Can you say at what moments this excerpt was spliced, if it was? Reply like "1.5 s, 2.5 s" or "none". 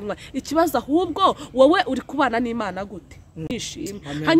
3.5 s